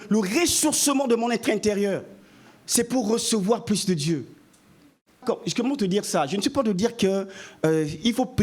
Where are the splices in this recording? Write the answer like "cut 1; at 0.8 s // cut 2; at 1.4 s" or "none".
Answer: cut 1; at 5.2 s